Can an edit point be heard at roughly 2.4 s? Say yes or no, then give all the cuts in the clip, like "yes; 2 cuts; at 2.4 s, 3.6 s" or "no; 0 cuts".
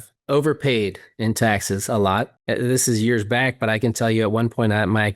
yes; 1 cut; at 2.4 s